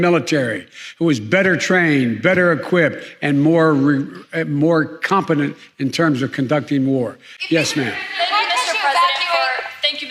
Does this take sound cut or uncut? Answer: uncut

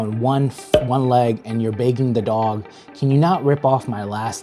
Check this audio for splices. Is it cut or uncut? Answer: uncut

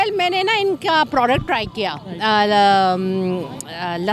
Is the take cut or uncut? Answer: uncut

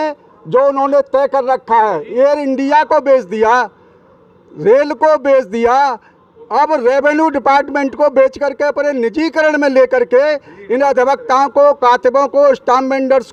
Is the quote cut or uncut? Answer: uncut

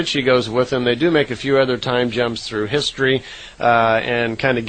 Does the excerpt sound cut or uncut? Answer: cut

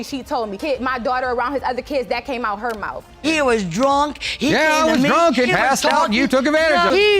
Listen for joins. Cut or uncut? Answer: cut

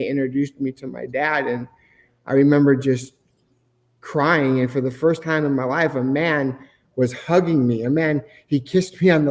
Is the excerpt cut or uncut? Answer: uncut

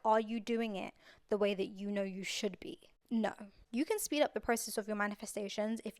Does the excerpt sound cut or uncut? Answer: cut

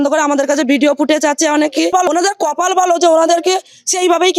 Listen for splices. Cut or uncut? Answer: cut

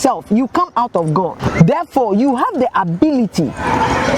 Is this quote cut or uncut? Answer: cut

